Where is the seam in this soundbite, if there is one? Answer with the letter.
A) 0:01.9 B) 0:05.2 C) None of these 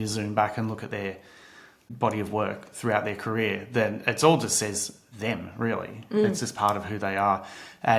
A